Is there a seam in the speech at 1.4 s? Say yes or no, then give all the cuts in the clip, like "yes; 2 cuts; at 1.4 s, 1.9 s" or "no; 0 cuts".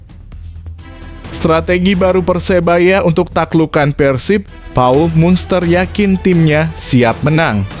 yes; 1 cut; at 1.4 s